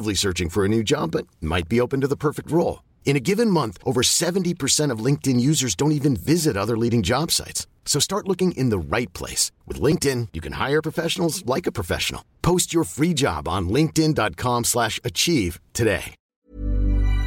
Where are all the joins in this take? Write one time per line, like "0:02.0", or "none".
0:16.3